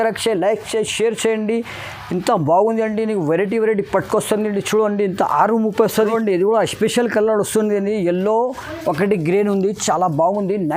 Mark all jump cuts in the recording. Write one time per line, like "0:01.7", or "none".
0:05.9

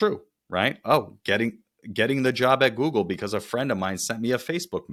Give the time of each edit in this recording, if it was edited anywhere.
none

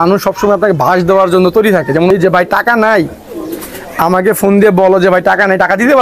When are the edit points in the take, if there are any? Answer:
0:02.1

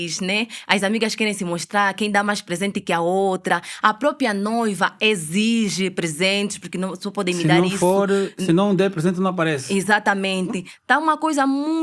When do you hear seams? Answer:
none

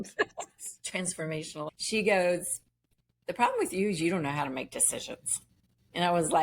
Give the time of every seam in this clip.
0:01.6

